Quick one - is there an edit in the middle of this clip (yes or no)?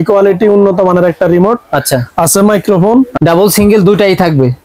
yes